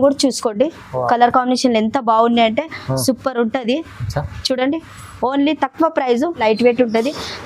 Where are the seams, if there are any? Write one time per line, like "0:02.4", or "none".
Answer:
0:06.4

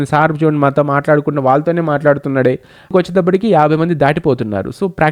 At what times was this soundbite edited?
0:02.9

